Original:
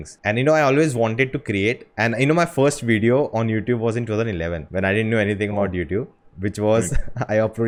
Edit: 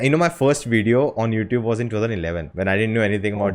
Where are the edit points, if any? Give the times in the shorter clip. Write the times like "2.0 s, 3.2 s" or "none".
none